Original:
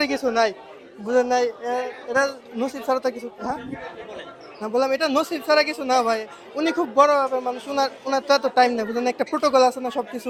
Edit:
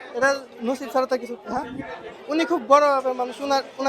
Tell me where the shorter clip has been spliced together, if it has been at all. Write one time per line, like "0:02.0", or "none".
0:02.1